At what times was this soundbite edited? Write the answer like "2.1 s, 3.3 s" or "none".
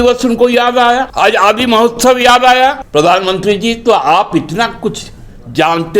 1.1 s, 2.8 s